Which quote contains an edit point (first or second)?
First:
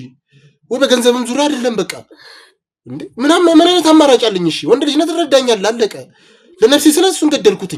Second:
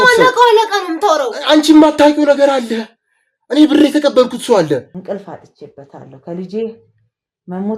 second